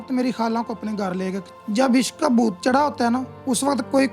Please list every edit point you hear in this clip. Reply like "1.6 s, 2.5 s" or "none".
1.5 s